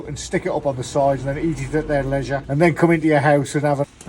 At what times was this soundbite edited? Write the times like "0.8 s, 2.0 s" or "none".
2.4 s